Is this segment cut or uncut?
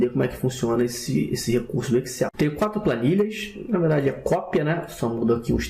cut